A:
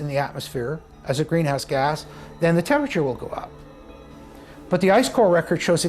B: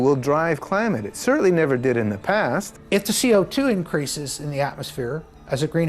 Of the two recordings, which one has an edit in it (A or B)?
B